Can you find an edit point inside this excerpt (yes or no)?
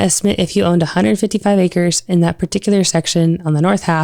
no